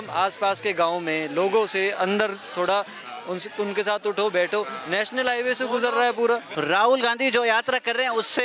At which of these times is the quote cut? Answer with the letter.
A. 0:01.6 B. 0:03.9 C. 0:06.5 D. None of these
C